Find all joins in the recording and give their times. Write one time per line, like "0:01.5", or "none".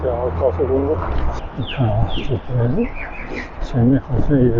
0:01.4

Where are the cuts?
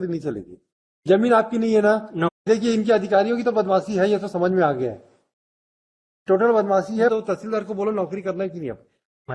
0:02.4
0:07.1

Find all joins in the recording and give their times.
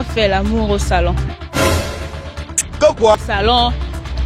0:03.3

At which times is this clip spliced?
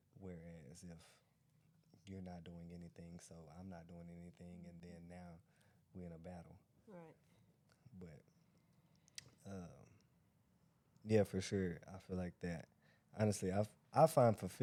none

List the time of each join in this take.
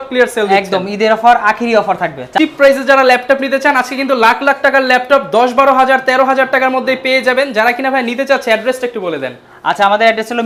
none

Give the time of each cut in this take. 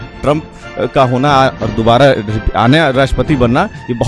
none

